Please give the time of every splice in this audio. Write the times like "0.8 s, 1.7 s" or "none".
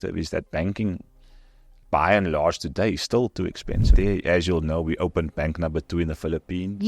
3.9 s